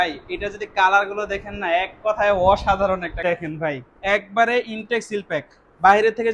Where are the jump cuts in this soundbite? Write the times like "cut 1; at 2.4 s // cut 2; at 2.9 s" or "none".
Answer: cut 1; at 3.2 s